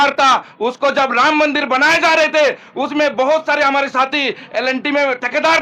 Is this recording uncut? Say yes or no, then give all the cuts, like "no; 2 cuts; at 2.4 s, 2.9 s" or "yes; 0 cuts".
yes; 0 cuts